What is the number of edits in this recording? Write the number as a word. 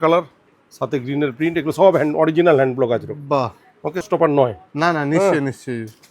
one